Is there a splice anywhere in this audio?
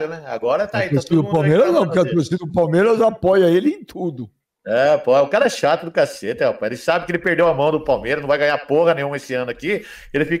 no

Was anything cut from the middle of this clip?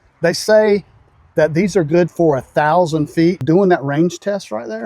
yes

